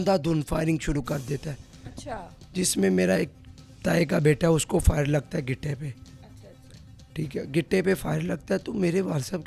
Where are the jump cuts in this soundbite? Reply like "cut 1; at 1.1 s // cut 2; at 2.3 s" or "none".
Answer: none